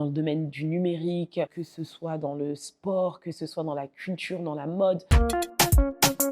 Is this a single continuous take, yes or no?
no